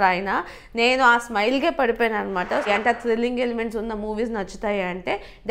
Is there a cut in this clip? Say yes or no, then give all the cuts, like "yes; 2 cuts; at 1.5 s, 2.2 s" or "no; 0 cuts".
yes; 1 cut; at 2.7 s